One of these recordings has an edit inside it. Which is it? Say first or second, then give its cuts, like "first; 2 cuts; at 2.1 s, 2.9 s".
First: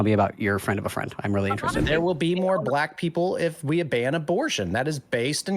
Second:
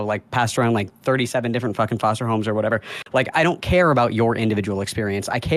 first; 1 cut; at 1.8 s